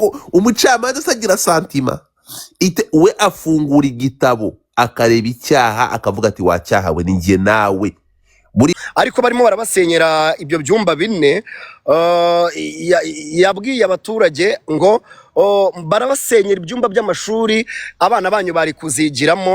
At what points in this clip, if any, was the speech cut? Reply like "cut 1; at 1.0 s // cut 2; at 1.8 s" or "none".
cut 1; at 8.7 s